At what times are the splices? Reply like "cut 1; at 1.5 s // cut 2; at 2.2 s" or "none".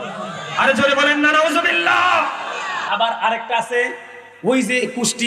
cut 1; at 2.7 s

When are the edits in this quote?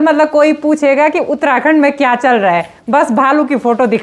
none

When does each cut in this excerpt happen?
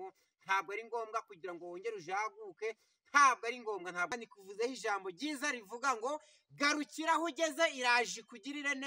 cut 1; at 4.1 s

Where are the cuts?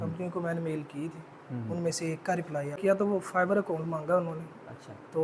cut 1; at 2.8 s

